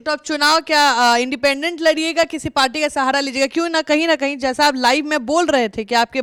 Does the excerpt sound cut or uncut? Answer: uncut